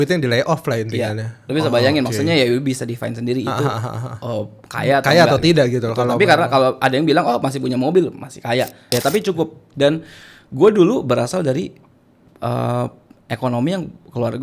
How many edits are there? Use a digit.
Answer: 1